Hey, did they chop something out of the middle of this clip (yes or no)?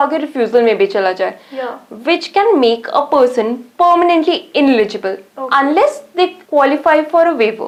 no